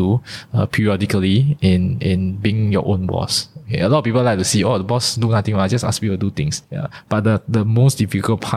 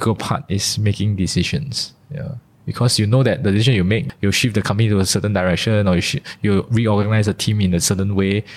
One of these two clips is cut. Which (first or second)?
first